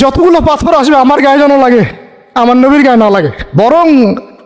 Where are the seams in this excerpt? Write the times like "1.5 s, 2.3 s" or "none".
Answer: 3.4 s